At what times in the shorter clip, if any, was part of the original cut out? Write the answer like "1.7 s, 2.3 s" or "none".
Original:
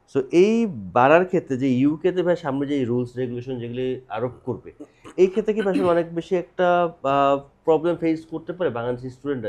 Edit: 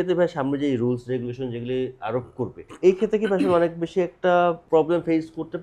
2.6 s, 4.6 s